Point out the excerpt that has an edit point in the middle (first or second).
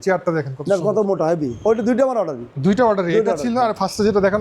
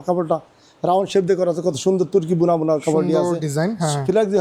first